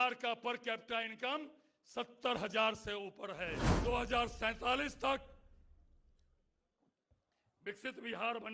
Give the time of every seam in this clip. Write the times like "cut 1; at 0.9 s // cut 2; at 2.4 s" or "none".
cut 1; at 3.7 s